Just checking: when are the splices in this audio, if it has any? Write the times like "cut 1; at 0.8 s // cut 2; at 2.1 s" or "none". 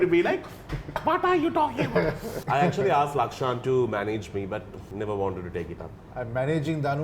cut 1; at 2.3 s // cut 2; at 4.8 s // cut 3; at 6.0 s